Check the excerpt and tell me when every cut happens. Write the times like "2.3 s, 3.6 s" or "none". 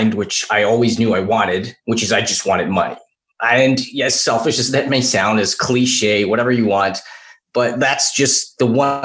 none